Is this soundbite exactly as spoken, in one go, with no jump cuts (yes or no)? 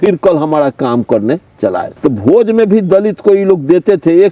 no